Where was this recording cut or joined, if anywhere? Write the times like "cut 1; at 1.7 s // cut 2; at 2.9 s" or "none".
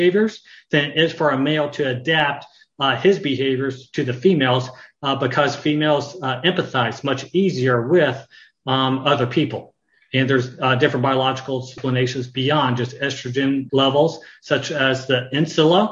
cut 1; at 11.8 s // cut 2; at 13.7 s